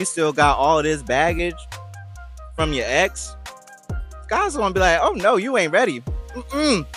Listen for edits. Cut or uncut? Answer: uncut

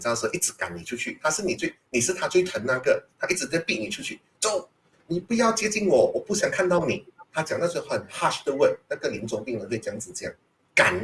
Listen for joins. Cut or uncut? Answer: uncut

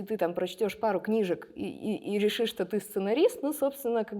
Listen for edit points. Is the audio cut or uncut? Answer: uncut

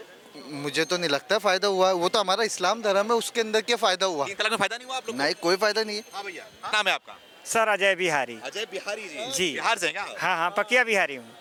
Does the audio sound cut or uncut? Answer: uncut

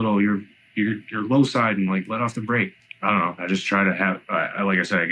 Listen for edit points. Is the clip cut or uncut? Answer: cut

